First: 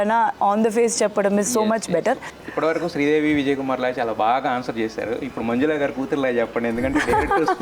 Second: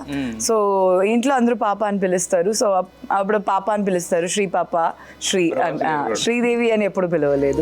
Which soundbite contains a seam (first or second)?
first